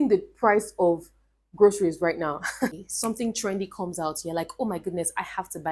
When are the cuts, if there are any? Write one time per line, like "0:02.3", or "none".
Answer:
0:02.7